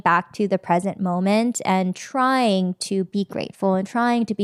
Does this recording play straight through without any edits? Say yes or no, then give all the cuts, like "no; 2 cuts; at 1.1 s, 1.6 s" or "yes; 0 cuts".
yes; 0 cuts